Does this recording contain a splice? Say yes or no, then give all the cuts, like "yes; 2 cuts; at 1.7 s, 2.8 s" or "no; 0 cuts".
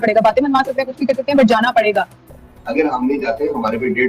yes; 1 cut; at 2.2 s